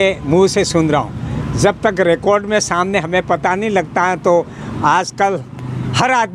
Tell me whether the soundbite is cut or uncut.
uncut